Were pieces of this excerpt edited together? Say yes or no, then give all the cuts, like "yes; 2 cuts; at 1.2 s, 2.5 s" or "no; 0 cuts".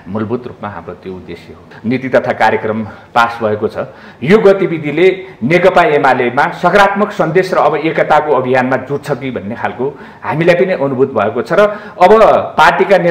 yes; 1 cut; at 1.7 s